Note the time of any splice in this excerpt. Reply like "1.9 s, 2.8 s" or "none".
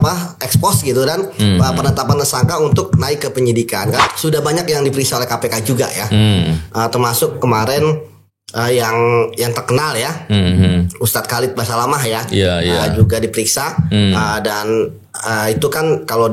4.0 s